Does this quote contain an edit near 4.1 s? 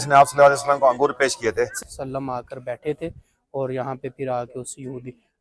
no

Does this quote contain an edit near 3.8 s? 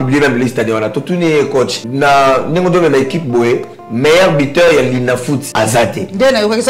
no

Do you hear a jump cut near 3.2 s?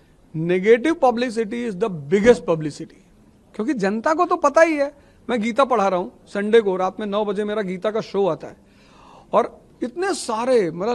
no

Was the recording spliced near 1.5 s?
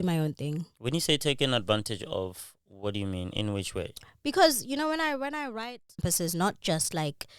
no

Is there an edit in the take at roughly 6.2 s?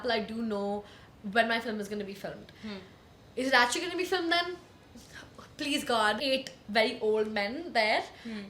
yes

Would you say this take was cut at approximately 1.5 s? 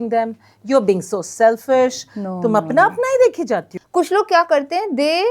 no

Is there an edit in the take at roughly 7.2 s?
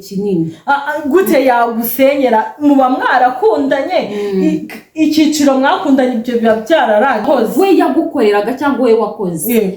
yes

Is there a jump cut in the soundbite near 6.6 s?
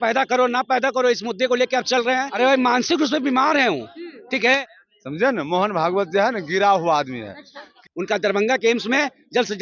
no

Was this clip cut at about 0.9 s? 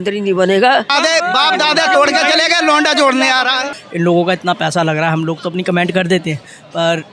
yes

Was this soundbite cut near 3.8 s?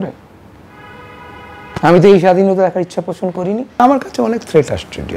yes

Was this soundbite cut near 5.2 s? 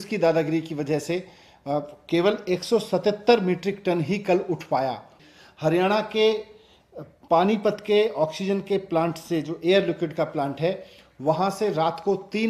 yes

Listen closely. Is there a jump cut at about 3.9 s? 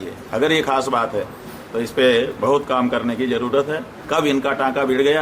yes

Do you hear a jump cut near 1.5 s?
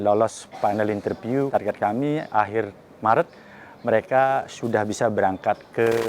yes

